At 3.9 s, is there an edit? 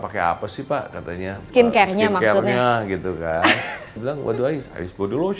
yes; 1 cut; at 3.9 s

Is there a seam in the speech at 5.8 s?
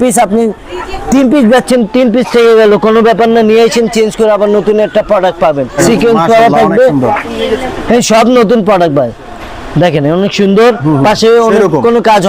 yes; 1 cut; at 5.8 s

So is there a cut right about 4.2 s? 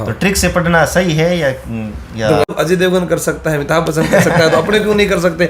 no; 1 cut; at 2.5 s

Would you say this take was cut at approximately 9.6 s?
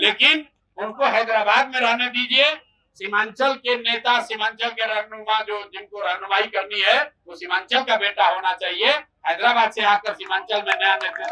no; 0 cuts

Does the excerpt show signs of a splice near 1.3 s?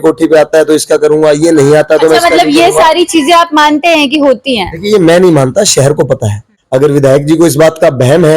no; 1 cut; at 6.8 s

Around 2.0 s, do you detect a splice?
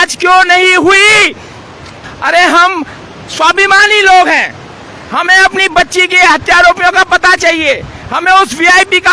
yes; 1 cut; at 2.0 s

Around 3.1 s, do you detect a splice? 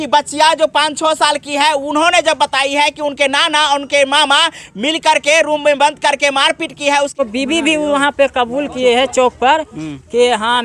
no; 1 cut; at 7.2 s

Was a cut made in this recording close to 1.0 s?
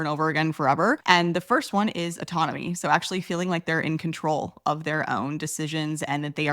yes; 1 cut; at 1.0 s

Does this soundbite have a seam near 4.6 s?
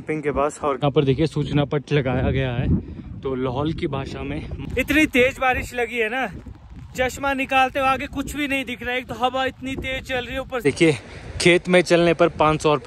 yes; 3 cuts; at 0.8 s, 4.6 s, 10.6 s

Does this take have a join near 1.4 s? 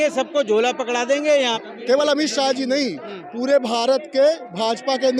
yes; 1 cut; at 1.4 s

